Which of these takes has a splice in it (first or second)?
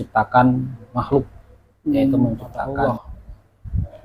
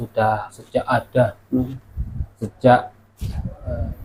first